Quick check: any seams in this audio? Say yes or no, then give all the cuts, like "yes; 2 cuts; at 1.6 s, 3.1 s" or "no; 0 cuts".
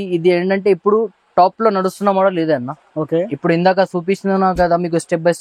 no; 0 cuts